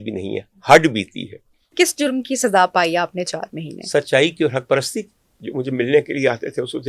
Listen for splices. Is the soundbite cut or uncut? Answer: cut